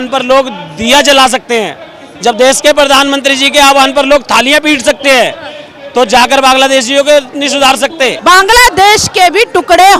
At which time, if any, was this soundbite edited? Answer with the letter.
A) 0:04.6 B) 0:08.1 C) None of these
B